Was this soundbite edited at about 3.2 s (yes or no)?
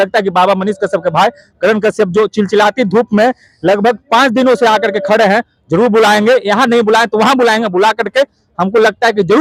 no